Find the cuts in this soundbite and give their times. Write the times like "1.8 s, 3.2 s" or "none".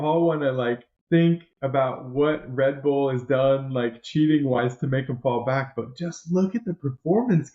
0.9 s